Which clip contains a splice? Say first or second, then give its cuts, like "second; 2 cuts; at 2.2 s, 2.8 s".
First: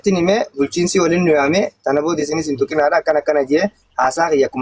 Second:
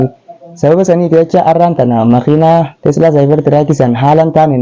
second; 1 cut; at 2.7 s